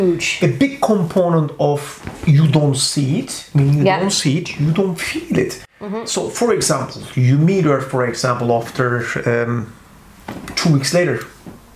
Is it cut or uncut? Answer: uncut